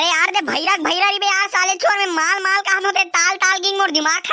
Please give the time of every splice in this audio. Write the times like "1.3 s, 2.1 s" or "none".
none